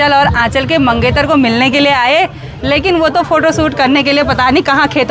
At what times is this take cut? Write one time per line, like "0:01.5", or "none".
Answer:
none